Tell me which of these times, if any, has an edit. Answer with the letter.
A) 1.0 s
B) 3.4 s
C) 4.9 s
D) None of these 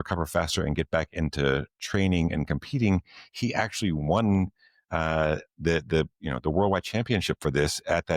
D